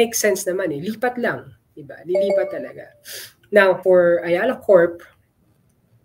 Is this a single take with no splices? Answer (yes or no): no